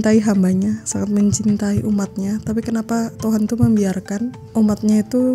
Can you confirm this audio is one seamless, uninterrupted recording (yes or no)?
no